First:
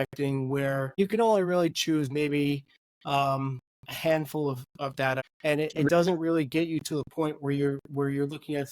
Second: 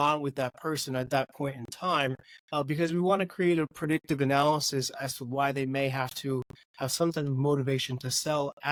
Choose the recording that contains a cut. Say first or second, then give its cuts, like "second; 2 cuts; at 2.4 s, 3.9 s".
first; 2 cuts; at 1.0 s, 5.2 s